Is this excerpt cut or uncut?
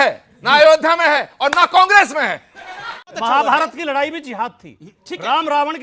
cut